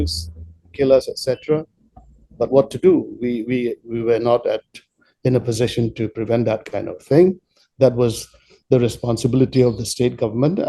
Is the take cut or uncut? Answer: uncut